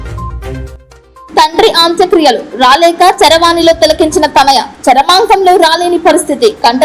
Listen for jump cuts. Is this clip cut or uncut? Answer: cut